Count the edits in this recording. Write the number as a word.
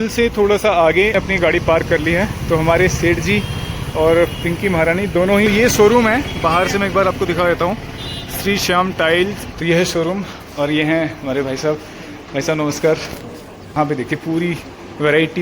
four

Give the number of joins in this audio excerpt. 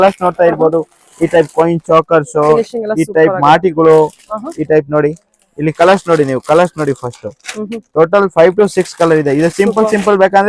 zero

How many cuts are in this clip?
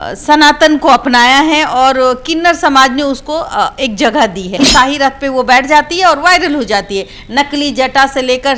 one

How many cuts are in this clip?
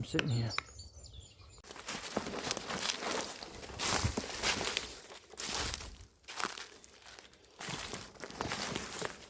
one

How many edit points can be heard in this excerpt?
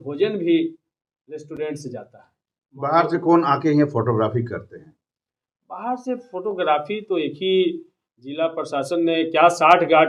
zero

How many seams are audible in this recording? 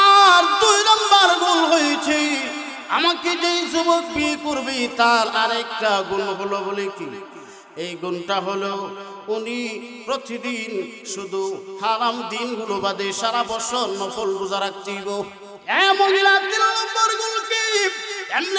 one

